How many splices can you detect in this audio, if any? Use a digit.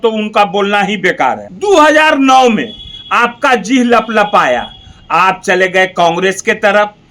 1